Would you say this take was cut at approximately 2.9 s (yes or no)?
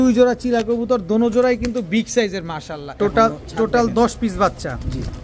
yes